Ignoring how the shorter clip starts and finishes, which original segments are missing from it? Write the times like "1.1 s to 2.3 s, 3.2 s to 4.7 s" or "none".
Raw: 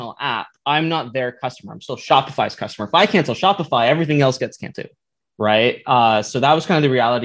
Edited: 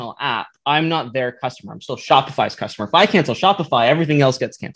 none